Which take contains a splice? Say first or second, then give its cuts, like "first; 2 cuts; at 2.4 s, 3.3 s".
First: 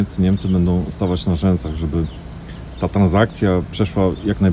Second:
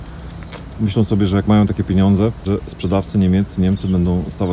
second; 1 cut; at 2.4 s